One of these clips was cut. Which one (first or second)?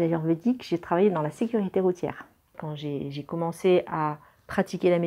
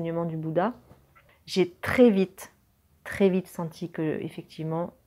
first